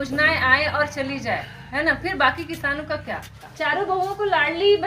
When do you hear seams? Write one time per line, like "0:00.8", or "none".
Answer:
0:03.4